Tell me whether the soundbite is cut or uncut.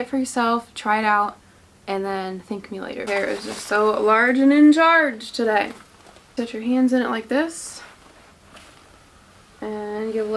cut